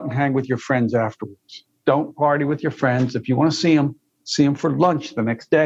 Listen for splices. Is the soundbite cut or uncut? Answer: cut